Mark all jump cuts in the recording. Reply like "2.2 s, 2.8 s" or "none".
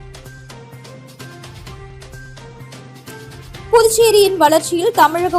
1.7 s